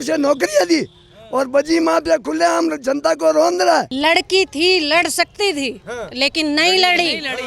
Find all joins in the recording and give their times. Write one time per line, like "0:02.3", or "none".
0:03.9